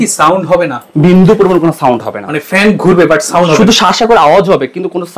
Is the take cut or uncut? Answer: uncut